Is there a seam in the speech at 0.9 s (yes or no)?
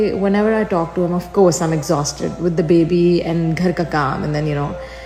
no